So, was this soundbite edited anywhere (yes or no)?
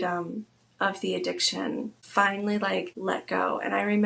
yes